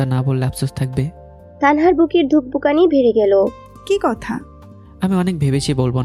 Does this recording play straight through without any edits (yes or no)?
yes